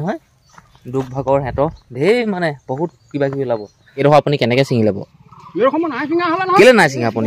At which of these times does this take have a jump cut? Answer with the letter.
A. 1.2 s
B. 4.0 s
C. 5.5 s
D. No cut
B